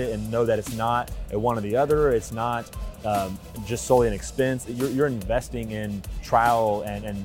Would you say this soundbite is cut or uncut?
uncut